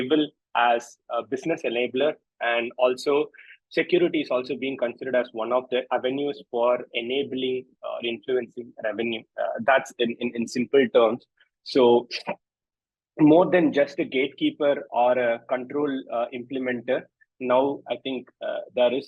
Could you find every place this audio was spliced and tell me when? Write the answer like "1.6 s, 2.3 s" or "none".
none